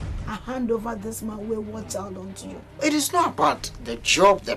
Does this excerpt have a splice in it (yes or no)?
yes